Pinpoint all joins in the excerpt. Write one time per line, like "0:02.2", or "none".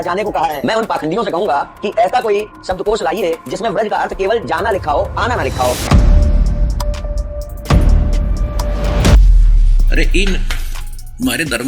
0:05.8